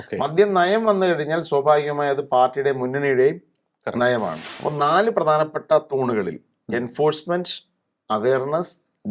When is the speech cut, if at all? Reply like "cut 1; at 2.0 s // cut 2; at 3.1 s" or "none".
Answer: cut 1; at 4.5 s